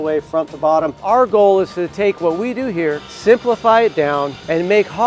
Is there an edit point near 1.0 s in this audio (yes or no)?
yes